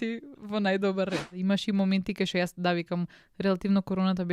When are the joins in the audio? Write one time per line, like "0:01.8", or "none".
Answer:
0:01.3